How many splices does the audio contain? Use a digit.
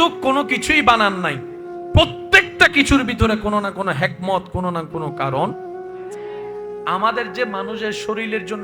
2